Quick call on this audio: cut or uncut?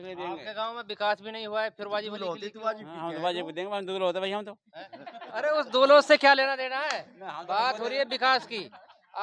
uncut